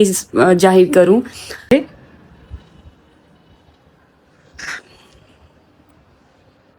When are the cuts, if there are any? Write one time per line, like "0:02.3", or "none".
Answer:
0:01.7